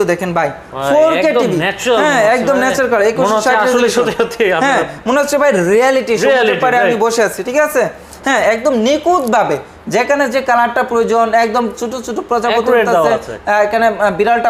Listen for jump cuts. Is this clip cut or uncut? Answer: uncut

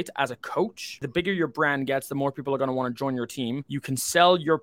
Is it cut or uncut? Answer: cut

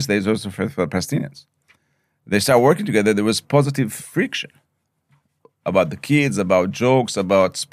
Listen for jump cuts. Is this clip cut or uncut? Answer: uncut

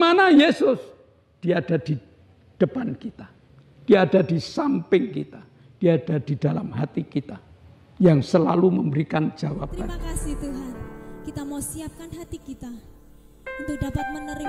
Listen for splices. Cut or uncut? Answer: cut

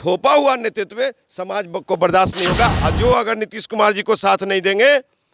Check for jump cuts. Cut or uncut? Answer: cut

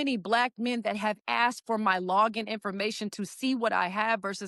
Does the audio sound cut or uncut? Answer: uncut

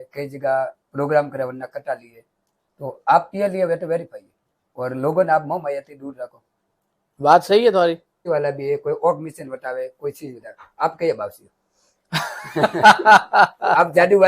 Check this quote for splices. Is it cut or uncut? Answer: cut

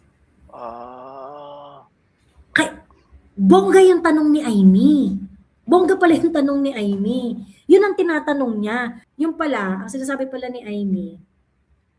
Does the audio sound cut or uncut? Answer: cut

